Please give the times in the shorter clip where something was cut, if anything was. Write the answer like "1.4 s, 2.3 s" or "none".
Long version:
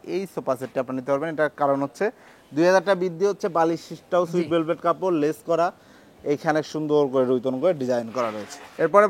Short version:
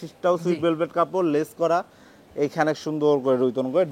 none